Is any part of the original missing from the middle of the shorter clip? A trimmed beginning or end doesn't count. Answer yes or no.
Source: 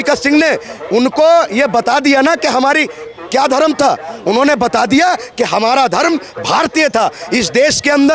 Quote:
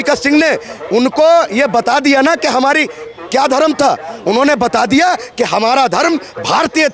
no